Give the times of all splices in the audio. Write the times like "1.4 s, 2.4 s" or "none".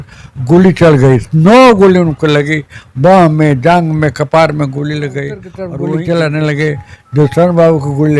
5.6 s